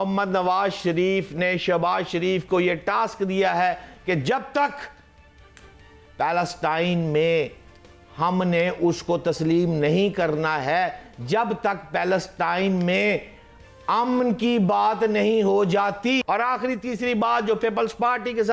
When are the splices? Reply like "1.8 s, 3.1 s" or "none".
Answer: none